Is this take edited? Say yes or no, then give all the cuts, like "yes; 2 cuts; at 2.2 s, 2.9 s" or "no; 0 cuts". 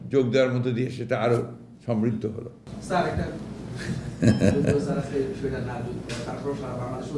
no; 0 cuts